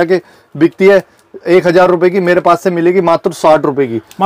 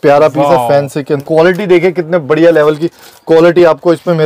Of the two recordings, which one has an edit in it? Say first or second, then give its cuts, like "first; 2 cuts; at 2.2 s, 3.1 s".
second; 1 cut; at 1.2 s